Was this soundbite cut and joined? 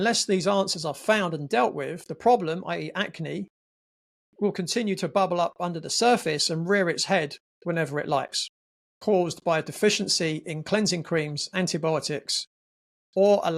yes; 1 cut; at 9.0 s

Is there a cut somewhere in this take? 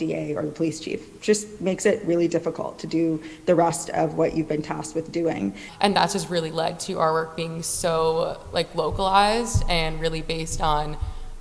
yes; 1 cut; at 5.6 s

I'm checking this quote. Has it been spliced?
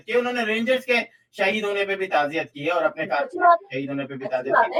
no; 0 cuts

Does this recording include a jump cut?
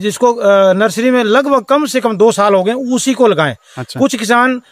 no; 0 cuts

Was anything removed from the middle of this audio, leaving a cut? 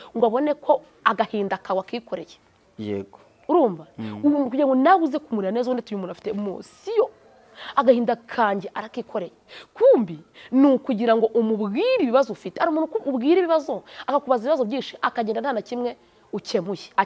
no; 0 cuts

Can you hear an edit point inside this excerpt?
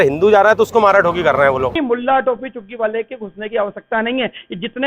yes; 1 cut; at 1.8 s

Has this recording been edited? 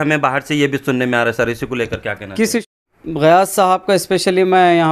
yes; 1 cut; at 2.6 s

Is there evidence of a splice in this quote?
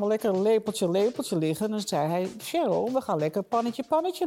no; 0 cuts

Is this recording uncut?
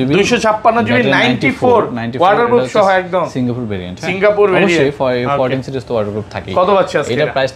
yes; 0 cuts

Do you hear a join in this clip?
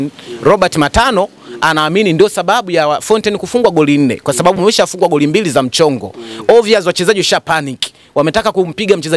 no; 0 cuts

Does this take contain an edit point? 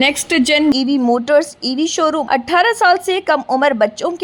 yes; 1 cut; at 2.2 s

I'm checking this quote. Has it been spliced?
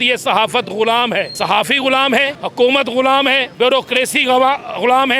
yes; 3 cuts; at 1.3 s, 2.4 s, 3.5 s

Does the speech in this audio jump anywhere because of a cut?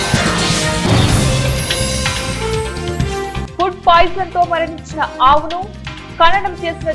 no; 0 cuts

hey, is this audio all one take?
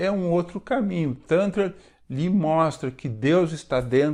yes; 0 cuts

